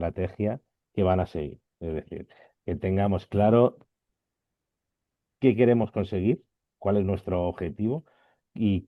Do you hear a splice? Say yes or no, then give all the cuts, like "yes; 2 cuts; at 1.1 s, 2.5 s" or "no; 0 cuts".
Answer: no; 0 cuts